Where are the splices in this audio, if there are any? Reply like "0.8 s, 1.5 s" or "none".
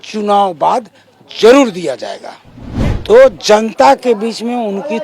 3.0 s